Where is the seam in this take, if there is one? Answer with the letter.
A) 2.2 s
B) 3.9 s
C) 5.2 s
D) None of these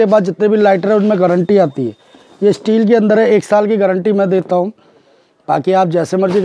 D